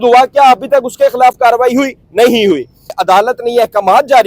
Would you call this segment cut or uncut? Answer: cut